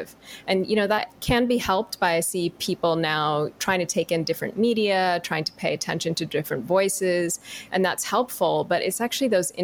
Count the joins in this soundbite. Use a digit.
2